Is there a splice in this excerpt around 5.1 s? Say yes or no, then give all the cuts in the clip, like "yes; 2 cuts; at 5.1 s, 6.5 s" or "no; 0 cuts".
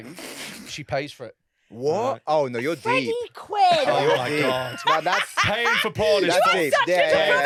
no; 0 cuts